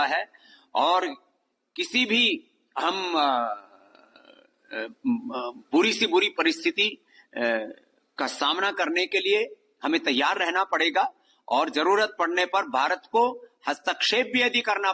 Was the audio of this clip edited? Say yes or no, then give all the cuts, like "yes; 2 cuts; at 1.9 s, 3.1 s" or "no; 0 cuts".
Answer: no; 0 cuts